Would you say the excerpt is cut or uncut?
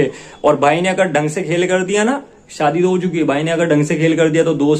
uncut